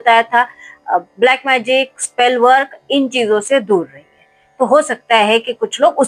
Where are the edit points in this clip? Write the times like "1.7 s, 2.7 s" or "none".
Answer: none